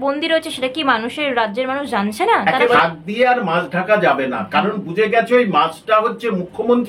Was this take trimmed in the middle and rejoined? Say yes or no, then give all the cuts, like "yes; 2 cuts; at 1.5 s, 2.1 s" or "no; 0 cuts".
yes; 1 cut; at 2.8 s